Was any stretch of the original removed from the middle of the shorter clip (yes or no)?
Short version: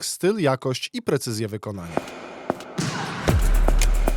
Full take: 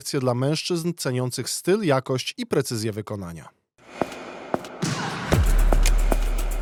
yes